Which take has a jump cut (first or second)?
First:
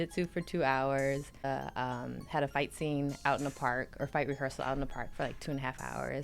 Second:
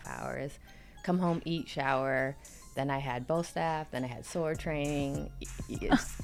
first